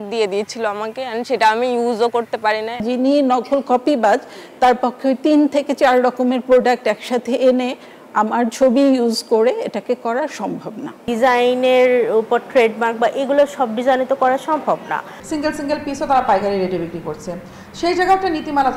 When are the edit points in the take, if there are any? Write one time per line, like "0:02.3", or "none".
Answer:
0:02.8
0:11.0
0:15.2